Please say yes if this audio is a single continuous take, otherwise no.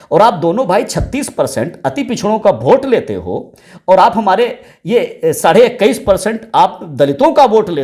yes